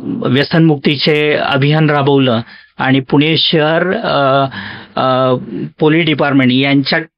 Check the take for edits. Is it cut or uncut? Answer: uncut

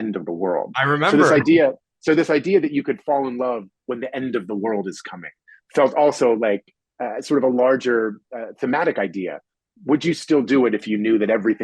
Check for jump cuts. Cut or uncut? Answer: uncut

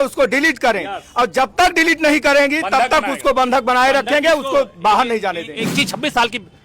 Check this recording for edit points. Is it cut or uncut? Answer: cut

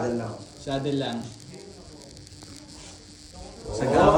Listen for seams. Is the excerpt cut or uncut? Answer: uncut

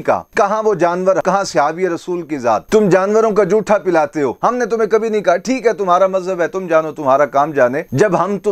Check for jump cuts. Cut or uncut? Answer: cut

